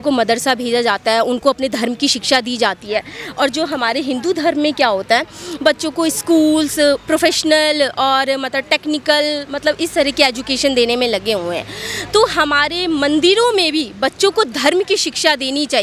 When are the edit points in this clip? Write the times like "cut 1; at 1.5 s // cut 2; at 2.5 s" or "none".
none

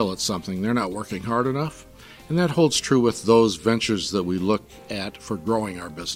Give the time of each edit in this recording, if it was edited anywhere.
cut 1; at 4.8 s

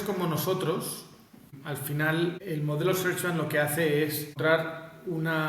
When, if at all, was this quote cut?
cut 1; at 1.5 s // cut 2; at 2.4 s // cut 3; at 4.3 s

